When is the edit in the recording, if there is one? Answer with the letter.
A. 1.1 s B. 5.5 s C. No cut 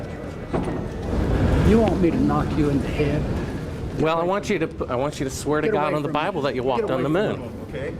A